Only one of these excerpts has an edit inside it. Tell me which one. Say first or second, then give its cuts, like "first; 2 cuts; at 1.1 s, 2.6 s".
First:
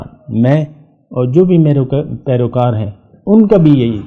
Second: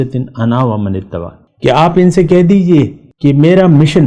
second; 2 cuts; at 1.4 s, 3.0 s